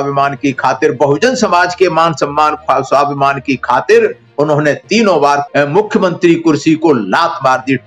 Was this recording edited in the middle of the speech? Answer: yes; 1 cut; at 5.4 s

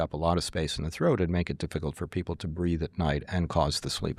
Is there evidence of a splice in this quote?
no; 0 cuts

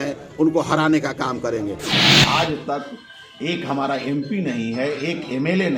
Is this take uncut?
no; 1 cut; at 1.9 s

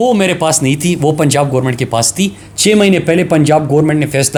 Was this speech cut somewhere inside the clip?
no; 0 cuts

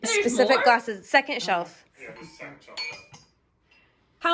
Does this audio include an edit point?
no; 0 cuts

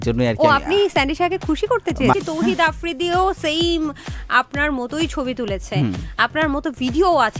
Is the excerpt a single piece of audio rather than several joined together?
no; 1 cut; at 2.1 s

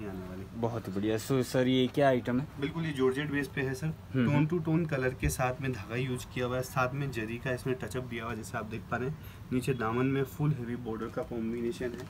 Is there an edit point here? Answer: no; 0 cuts

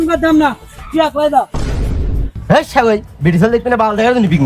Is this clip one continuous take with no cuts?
yes; 0 cuts

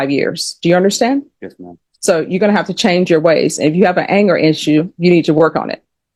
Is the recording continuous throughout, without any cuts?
yes; 0 cuts

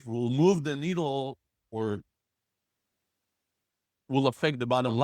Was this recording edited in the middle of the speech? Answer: no; 0 cuts

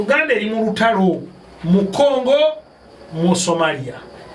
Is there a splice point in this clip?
no; 0 cuts

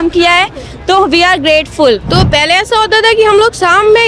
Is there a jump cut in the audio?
yes; 1 cut; at 2.1 s

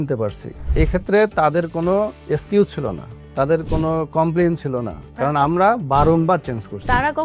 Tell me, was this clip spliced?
yes; 2 cuts; at 2.2 s, 5.0 s

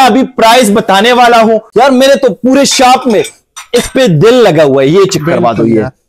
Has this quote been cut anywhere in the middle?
yes; 1 cut; at 1.7 s

